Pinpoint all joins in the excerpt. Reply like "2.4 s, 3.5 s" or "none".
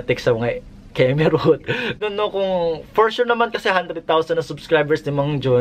2.0 s